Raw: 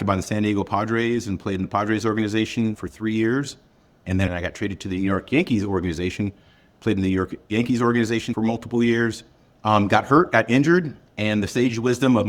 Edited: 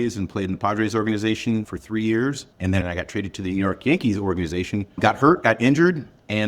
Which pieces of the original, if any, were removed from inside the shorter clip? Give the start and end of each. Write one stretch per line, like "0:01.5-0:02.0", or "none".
0:03.6-0:03.9
0:06.4-0:09.9